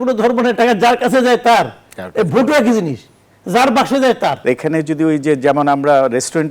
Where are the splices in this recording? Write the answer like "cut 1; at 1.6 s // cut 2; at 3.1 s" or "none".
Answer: cut 1; at 4.4 s